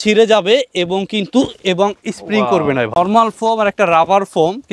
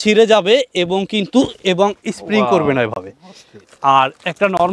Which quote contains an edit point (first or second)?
first